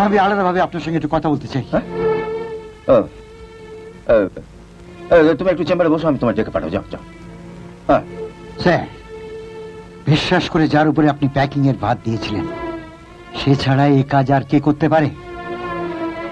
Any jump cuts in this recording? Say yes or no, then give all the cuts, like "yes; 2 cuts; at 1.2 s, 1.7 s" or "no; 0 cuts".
no; 0 cuts